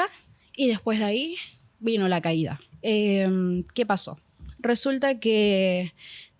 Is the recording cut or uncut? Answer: uncut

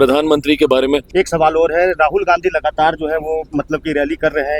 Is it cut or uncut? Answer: cut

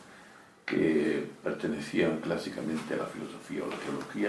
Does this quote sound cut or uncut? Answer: uncut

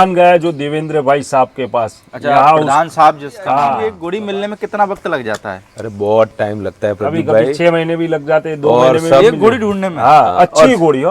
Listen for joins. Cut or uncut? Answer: cut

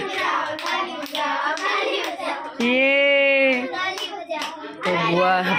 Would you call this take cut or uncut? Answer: uncut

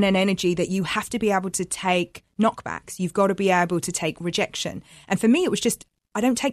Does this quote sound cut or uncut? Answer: uncut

